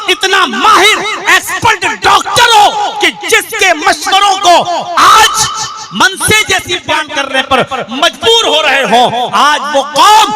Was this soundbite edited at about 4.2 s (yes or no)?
no